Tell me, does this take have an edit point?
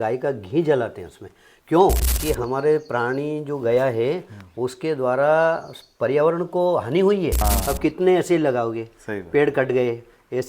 yes; 2 cuts; at 2.1 s, 7.4 s

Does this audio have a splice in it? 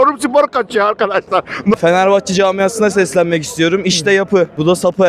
yes; 1 cut; at 1.7 s

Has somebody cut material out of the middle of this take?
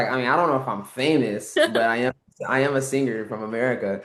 no; 0 cuts

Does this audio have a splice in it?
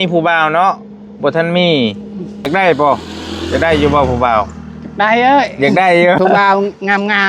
yes; 2 cuts; at 2.5 s, 6.2 s

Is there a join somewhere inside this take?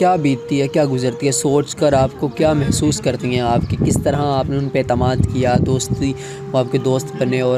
no; 0 cuts

